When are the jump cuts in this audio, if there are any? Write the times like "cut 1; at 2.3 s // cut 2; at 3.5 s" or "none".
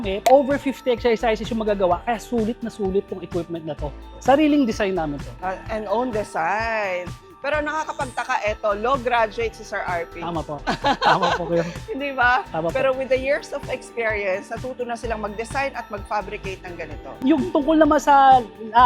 none